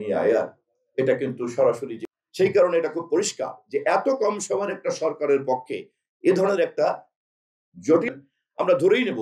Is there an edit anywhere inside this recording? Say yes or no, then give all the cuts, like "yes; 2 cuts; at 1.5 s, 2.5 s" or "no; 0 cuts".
yes; 2 cuts; at 2.0 s, 8.1 s